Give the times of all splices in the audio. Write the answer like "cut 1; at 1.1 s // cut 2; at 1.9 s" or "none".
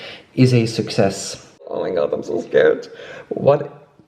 cut 1; at 1.7 s